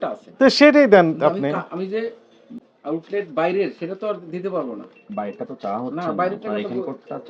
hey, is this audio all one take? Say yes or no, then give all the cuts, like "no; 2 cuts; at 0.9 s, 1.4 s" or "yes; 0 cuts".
yes; 0 cuts